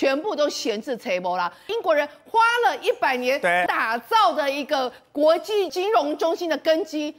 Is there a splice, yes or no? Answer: yes